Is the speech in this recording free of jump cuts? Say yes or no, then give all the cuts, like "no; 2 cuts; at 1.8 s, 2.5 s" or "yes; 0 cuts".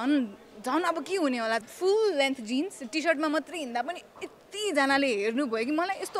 no; 1 cut; at 1.6 s